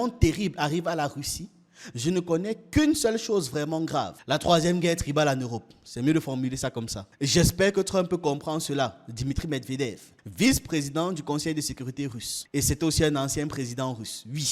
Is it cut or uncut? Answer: uncut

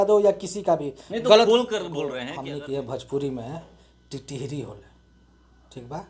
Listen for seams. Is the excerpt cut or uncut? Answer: cut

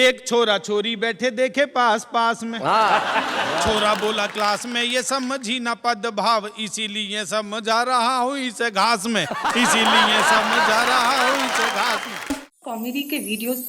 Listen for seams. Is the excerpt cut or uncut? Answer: cut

